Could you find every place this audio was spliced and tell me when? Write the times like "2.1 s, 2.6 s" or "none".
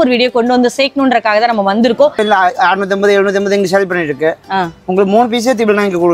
2.2 s